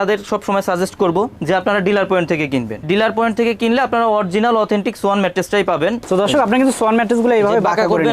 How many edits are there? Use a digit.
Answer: 2